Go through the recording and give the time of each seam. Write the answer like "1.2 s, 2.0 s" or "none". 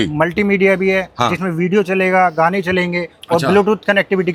none